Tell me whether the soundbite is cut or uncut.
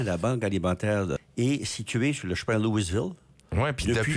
cut